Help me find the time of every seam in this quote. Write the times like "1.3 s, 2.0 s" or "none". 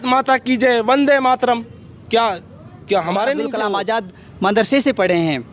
3.5 s